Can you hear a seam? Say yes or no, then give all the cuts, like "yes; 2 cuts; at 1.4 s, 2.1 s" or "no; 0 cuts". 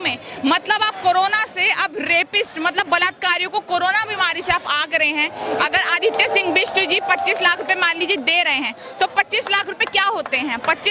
yes; 1 cut; at 5.4 s